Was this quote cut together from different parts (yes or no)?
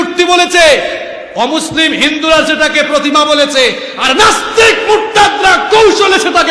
no